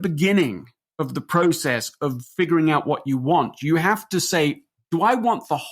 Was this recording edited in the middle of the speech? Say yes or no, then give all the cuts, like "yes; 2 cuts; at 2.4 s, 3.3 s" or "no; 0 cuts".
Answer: yes; 1 cut; at 4.7 s